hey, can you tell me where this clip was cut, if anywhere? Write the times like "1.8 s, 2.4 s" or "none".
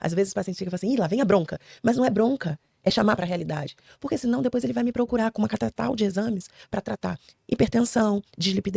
3.2 s